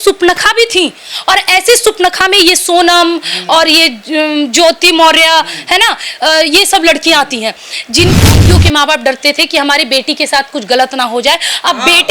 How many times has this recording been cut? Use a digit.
1